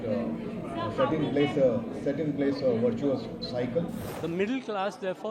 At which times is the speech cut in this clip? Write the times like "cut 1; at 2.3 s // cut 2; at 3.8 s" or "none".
cut 1; at 4.1 s